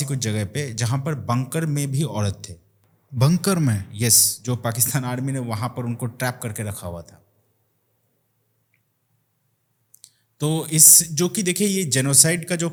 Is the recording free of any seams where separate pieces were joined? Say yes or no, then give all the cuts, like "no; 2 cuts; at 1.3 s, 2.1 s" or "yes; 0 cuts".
yes; 0 cuts